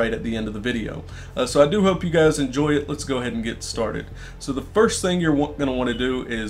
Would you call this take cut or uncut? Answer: uncut